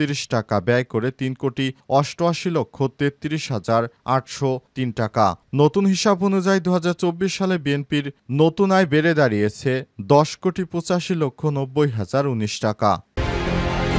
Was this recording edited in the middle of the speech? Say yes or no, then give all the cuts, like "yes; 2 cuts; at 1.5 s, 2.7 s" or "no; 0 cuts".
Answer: yes; 1 cut; at 13.1 s